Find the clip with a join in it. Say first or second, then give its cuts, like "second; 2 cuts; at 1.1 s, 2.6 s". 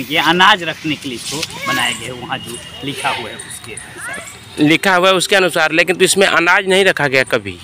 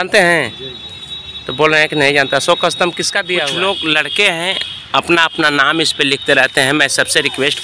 second; 1 cut; at 3.4 s